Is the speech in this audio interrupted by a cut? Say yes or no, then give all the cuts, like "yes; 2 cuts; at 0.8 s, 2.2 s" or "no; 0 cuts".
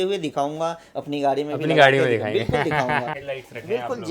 yes; 1 cut; at 3.2 s